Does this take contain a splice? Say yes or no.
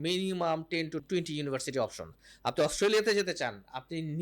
yes